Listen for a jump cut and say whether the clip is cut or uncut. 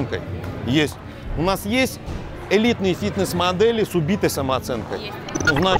uncut